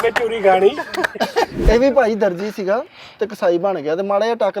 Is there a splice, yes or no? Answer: yes